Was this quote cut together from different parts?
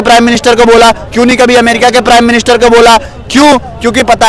no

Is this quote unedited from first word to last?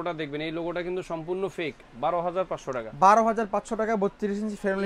no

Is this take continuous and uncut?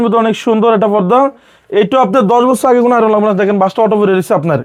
yes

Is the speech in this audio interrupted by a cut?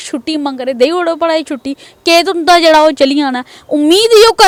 no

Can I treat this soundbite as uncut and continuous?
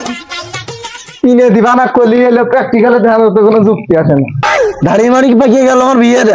no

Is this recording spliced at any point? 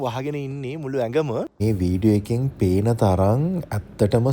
yes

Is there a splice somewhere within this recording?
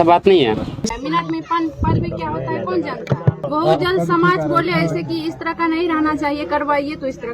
yes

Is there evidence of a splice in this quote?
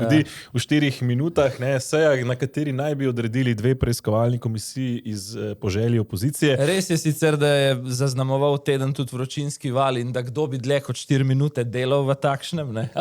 no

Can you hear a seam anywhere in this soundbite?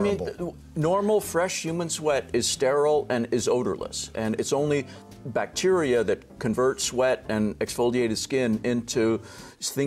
no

